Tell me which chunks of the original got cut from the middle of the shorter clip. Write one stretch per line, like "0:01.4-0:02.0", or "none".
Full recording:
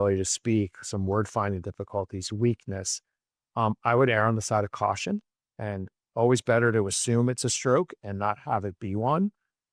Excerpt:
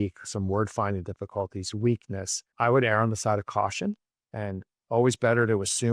0:03.1-0:03.8